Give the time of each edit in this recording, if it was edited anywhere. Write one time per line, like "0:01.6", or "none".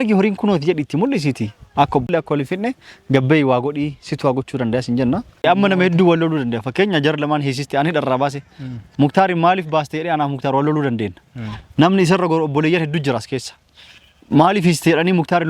0:02.1
0:05.4